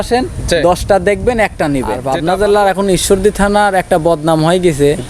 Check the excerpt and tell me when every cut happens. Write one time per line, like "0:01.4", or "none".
0:02.1